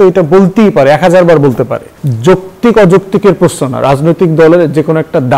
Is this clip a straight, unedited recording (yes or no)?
no